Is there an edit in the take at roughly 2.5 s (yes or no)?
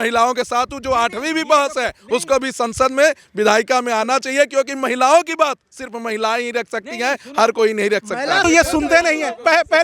no